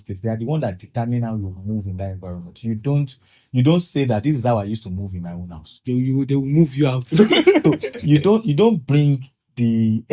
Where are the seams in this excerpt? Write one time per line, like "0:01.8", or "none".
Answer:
0:07.6